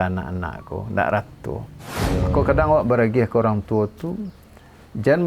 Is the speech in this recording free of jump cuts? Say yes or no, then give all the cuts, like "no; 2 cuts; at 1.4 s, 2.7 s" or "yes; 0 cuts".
no; 1 cut; at 2.1 s